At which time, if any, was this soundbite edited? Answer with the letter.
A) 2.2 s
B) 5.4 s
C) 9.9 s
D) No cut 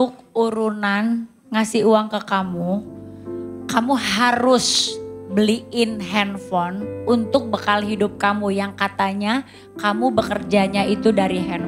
D